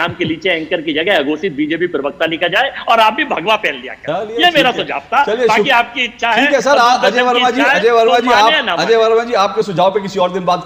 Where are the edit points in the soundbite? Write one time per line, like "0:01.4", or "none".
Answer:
none